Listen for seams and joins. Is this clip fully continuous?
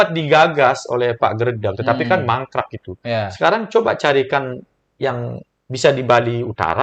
yes; 0 cuts

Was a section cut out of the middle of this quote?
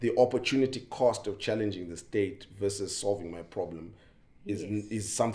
no; 0 cuts

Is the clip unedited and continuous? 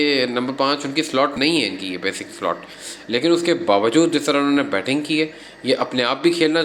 no; 1 cut; at 1.3 s

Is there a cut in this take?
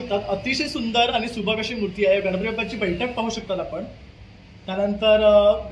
no; 0 cuts

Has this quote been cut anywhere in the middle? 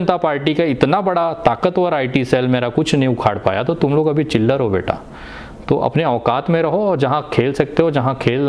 no; 0 cuts

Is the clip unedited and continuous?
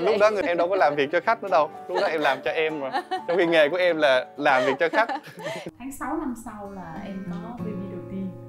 no; 1 cut; at 5.6 s

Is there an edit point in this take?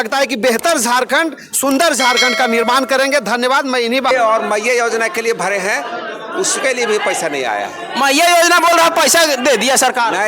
yes; 1 cut; at 4.1 s

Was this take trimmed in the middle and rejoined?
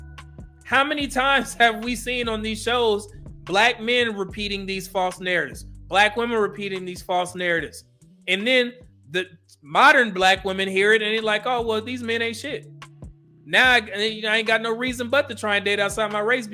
no; 0 cuts

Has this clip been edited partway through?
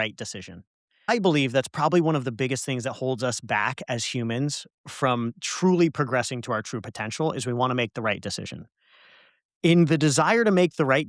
yes; 1 cut; at 1.2 s

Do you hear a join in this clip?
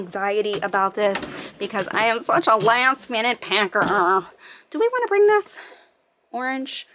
no; 0 cuts

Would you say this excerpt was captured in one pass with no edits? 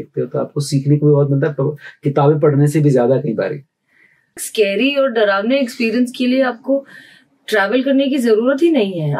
no; 1 cut; at 4.4 s

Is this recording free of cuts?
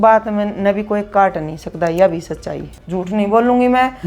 no; 1 cut; at 2.8 s

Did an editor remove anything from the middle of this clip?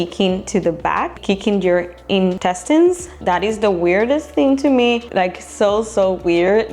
yes; 4 cuts; at 1.2 s, 2.4 s, 3.1 s, 5.0 s

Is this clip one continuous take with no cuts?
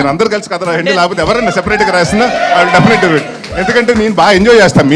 yes; 0 cuts

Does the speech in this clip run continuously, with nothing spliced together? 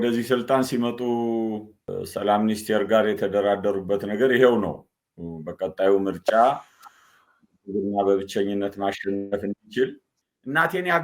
no; 1 cut; at 10.0 s

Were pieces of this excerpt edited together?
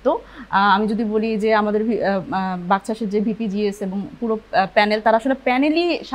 no; 0 cuts

